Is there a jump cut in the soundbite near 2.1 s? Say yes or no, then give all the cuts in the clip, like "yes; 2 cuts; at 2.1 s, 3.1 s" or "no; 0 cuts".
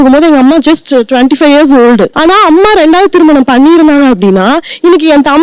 yes; 1 cut; at 2.1 s